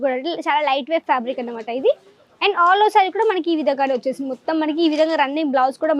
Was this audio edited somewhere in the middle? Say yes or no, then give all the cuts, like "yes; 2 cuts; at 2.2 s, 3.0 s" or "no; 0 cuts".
no; 0 cuts